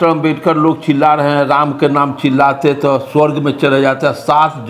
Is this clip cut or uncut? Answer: uncut